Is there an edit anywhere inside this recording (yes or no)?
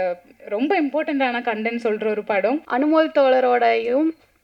yes